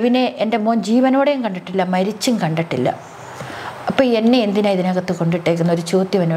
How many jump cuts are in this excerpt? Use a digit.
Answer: 0